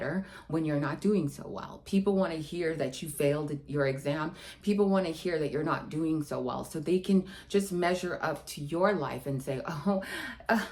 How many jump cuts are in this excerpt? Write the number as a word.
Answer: zero